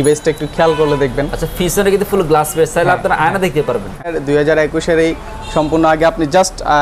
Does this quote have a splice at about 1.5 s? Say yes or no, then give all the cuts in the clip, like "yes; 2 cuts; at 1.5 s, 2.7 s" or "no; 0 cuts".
no; 1 cut; at 4.2 s